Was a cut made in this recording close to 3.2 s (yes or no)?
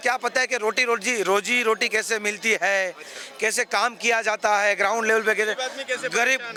no